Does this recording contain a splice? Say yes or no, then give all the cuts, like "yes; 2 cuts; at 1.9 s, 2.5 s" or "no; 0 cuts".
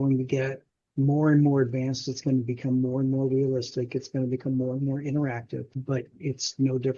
yes; 1 cut; at 5.7 s